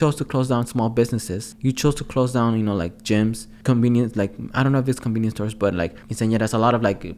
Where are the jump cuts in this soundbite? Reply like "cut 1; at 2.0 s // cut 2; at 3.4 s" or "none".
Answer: cut 1; at 1.4 s // cut 2; at 3.5 s // cut 3; at 6.0 s